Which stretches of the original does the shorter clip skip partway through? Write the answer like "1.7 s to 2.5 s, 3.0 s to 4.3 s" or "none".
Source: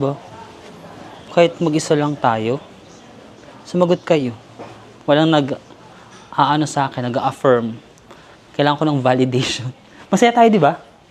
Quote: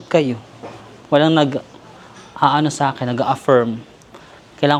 none